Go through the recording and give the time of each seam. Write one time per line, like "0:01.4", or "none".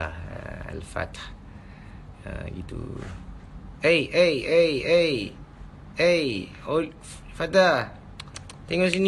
none